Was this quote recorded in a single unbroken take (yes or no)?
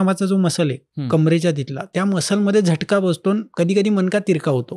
no